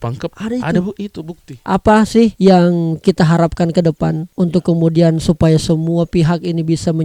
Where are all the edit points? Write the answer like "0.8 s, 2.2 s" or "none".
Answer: 1.6 s